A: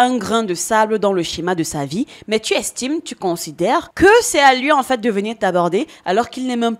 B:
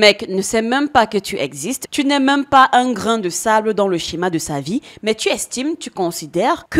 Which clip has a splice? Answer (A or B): B